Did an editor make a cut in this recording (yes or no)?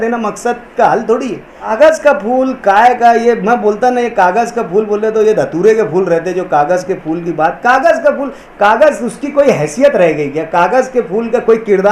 yes